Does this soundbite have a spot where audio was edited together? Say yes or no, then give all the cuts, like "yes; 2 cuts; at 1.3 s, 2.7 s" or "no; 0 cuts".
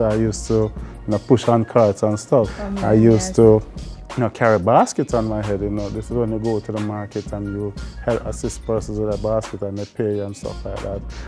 yes; 1 cut; at 2.5 s